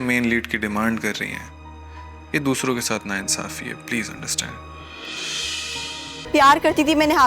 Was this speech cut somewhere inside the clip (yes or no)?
yes